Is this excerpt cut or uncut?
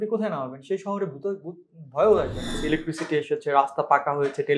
cut